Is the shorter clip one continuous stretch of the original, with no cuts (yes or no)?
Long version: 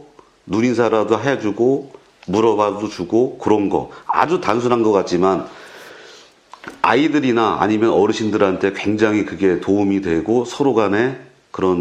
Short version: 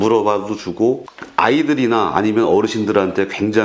no